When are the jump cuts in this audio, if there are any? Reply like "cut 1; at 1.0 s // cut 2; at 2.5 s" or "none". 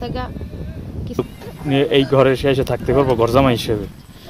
cut 1; at 1.2 s